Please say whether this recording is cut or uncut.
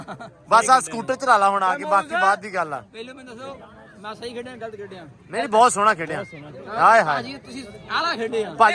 uncut